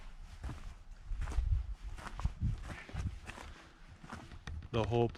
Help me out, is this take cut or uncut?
uncut